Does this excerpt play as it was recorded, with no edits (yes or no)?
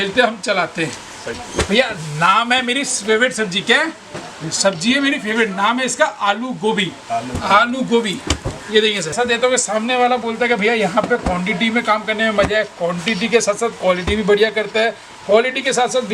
no